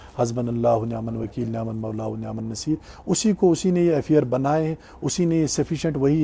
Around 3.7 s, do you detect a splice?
no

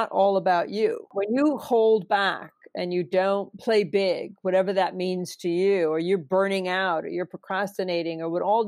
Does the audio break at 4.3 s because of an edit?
no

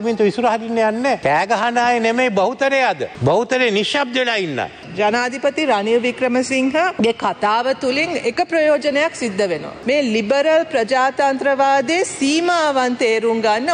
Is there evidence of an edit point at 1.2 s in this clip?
yes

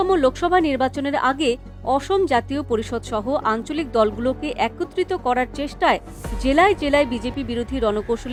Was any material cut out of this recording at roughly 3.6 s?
no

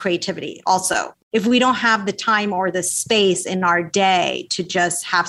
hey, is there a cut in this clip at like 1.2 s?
yes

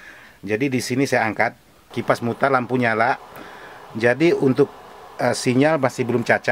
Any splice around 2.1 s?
yes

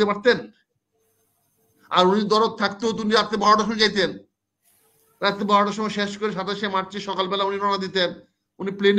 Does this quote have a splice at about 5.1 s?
no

